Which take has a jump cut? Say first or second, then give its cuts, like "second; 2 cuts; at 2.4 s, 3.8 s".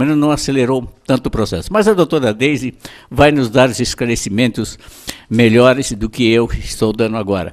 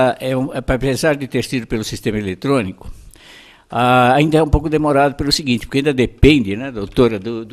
first; 1 cut; at 3.6 s